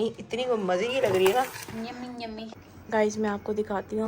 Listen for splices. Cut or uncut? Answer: cut